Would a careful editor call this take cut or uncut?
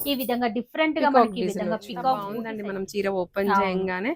cut